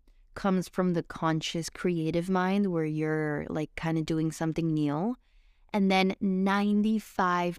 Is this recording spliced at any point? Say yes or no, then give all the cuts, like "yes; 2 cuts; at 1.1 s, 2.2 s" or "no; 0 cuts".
no; 0 cuts